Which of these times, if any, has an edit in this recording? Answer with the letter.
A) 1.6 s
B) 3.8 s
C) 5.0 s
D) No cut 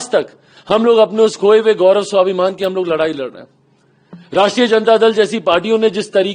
D